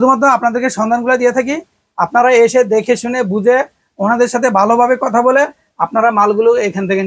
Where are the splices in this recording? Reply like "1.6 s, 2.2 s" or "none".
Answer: none